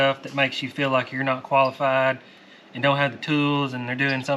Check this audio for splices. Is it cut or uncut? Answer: uncut